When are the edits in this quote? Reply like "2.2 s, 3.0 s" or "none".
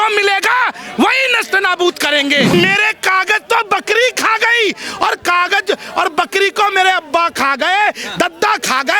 2.5 s

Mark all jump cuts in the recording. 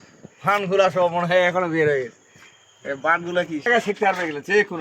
3.7 s

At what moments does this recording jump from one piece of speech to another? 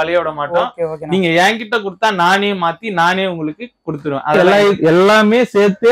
4.4 s

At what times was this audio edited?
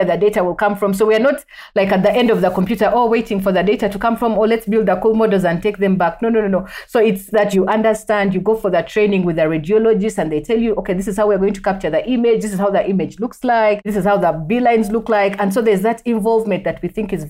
7.5 s, 13.9 s

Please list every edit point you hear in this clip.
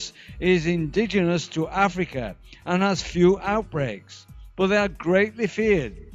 none

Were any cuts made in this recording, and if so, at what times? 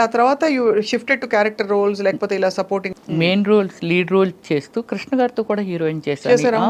2.9 s

